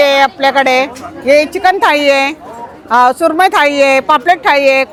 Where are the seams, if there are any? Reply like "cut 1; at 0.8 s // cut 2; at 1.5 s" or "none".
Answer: none